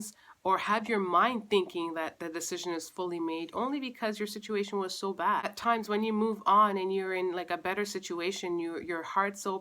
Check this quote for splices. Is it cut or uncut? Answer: cut